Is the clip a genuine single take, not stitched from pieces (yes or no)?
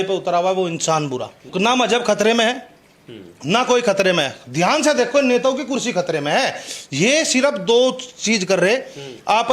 yes